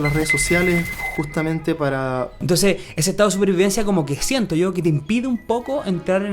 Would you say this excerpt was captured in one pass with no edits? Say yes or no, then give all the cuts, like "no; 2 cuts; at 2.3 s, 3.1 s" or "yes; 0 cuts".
no; 1 cut; at 2.4 s